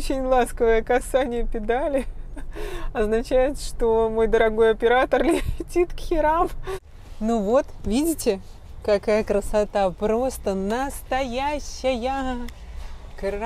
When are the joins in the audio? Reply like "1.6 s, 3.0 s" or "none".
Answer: 6.8 s